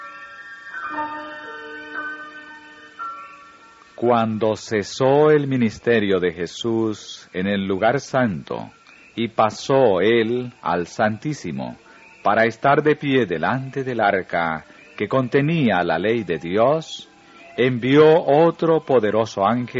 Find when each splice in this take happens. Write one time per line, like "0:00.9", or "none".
none